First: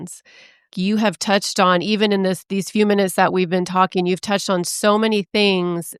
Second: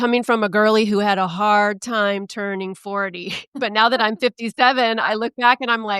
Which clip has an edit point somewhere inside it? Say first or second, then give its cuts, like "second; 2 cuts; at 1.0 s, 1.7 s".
second; 1 cut; at 3.4 s